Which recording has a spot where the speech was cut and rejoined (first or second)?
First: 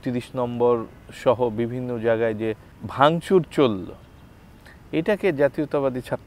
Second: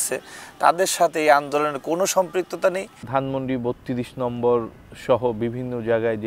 second